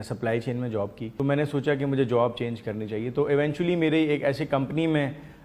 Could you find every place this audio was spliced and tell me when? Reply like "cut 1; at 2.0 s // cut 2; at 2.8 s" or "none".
cut 1; at 1.0 s

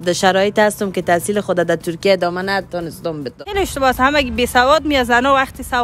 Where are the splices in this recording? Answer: cut 1; at 3.4 s

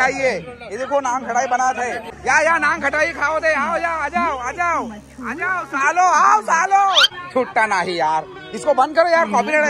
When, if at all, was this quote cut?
cut 1; at 2.1 s // cut 2; at 7.1 s

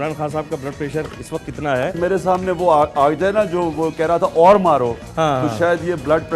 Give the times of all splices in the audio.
cut 1; at 2.0 s

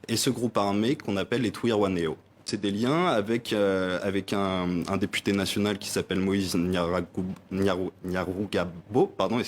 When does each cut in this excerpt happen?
cut 1; at 2.5 s

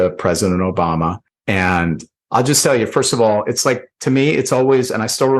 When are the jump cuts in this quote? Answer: cut 1; at 1.3 s // cut 2; at 2.1 s

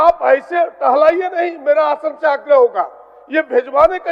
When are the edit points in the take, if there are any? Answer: none

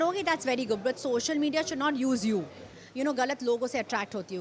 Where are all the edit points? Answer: cut 1; at 2.8 s

